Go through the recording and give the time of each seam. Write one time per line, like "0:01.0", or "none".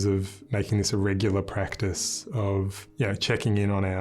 0:02.8